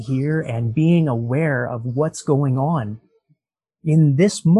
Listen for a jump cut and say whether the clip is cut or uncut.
uncut